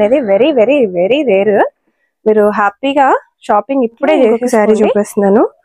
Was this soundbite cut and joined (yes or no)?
yes